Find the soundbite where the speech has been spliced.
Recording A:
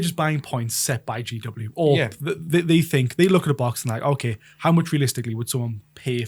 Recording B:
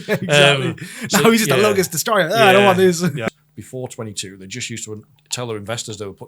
B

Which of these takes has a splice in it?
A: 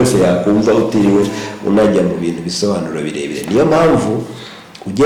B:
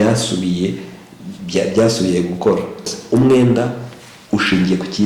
B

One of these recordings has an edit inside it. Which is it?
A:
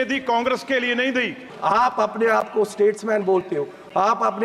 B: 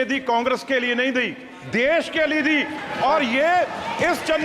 A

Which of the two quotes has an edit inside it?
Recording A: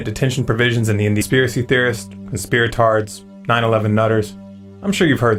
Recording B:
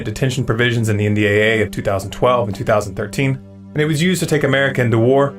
B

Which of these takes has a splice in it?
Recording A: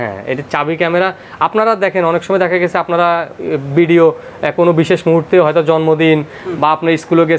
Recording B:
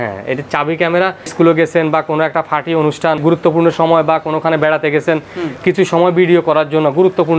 B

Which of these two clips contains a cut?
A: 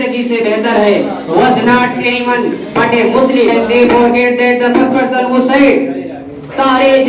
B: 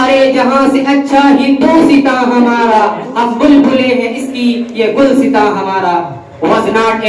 A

